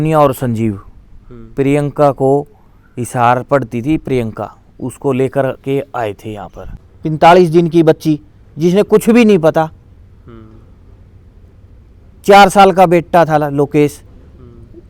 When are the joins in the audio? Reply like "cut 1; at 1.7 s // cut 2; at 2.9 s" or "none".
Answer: cut 1; at 6.8 s